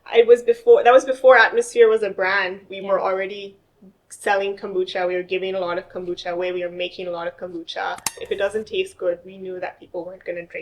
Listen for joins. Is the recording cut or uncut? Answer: cut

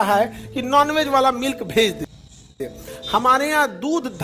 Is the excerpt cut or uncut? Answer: cut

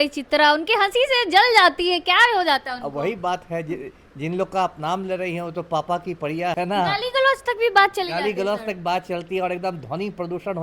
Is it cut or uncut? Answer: cut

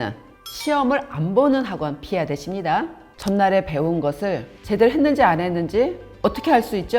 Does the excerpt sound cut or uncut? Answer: cut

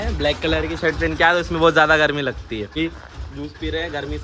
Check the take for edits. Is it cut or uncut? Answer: cut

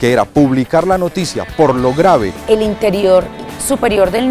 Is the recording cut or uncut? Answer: cut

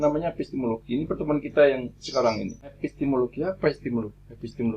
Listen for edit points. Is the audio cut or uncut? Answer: cut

